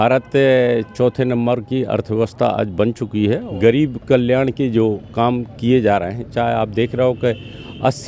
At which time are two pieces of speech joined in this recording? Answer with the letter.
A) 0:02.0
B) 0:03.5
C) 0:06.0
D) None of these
B